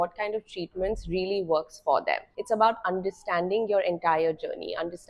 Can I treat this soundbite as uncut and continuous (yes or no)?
no